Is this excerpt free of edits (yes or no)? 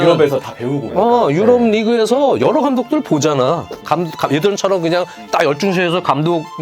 no